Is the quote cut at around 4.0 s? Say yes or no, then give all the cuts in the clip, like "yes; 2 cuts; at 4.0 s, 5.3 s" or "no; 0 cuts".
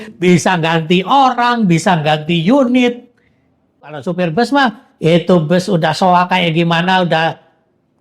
yes; 1 cut; at 4.0 s